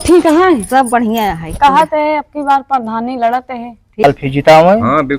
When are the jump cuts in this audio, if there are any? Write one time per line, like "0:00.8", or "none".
0:04.0